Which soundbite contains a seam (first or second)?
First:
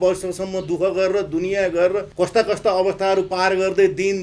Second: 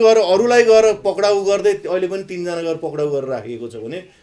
first